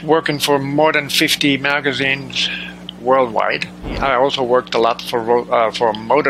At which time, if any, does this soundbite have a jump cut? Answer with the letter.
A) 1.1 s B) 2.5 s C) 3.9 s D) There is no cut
C